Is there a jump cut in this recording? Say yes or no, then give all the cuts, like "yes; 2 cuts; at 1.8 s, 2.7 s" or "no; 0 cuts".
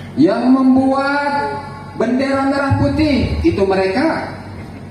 no; 0 cuts